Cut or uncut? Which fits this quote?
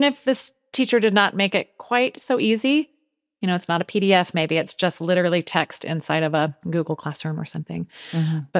cut